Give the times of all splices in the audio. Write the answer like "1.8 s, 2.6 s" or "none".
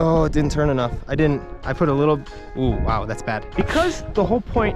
3.5 s